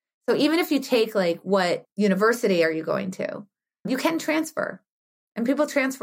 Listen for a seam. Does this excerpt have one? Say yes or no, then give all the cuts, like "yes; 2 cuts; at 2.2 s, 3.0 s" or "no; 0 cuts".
yes; 2 cuts; at 1.9 s, 3.9 s